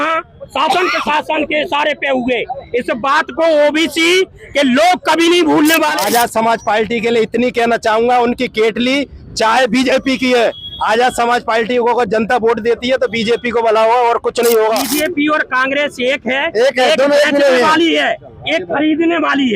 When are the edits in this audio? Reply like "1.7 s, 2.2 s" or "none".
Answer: 5.9 s, 14.9 s